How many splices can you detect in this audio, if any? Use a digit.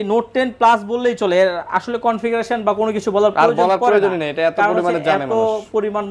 0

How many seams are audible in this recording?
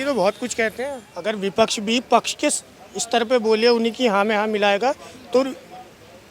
1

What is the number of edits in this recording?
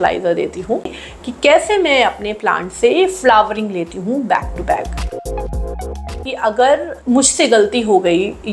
2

